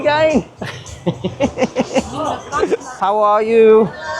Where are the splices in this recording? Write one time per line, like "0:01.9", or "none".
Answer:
0:02.9